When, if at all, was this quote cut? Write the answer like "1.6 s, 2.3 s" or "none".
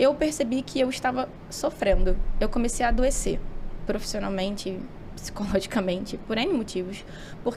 none